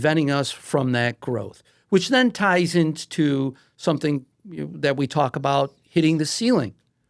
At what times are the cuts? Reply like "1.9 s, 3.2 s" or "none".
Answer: none